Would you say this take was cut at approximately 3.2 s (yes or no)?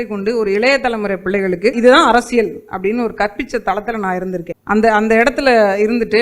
no